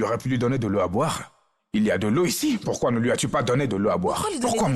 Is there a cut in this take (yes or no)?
no